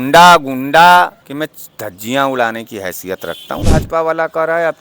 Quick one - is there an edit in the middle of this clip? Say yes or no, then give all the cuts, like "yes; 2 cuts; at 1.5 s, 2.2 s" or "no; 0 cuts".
yes; 2 cuts; at 1.2 s, 3.6 s